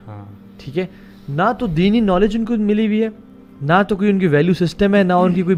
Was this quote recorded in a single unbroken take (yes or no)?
yes